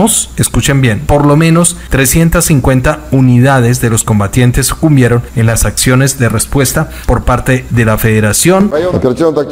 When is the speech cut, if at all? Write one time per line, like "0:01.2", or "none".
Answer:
0:01.0
0:01.8
0:07.0
0:08.7